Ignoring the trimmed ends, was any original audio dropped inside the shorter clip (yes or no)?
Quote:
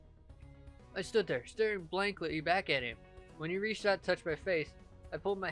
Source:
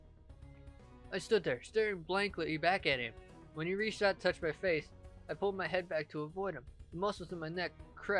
yes